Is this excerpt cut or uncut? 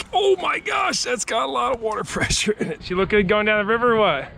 cut